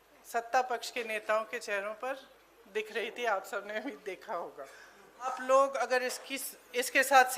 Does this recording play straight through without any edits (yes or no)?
no